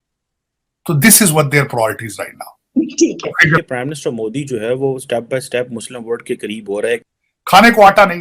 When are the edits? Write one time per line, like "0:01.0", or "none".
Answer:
0:03.6
0:07.1